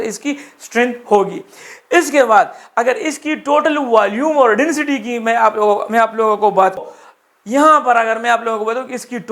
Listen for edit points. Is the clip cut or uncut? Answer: cut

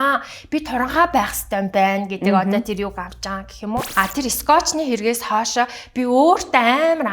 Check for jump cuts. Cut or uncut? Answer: cut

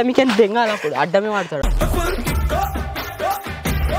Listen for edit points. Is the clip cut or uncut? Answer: uncut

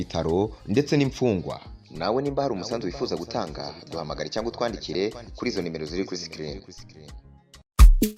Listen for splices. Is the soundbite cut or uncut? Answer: uncut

